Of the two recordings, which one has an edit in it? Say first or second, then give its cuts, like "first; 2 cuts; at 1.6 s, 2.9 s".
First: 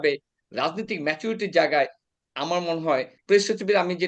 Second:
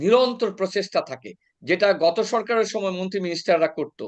first; 1 cut; at 3.2 s